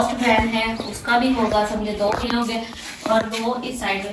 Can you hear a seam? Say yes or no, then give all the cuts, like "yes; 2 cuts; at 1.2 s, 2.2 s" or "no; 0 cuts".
no; 0 cuts